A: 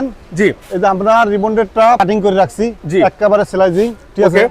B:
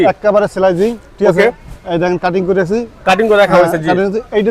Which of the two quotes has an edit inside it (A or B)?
A